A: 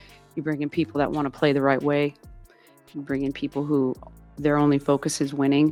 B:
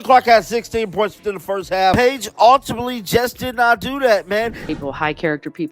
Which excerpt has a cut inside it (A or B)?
B